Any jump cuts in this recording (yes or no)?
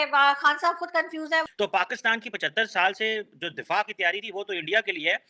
yes